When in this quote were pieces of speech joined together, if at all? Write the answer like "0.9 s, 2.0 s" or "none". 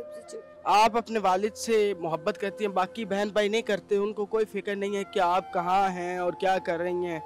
none